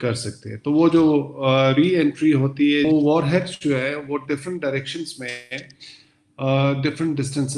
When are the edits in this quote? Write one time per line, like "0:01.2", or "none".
0:02.9